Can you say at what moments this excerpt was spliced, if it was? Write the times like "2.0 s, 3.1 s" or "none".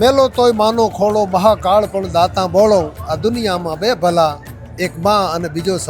none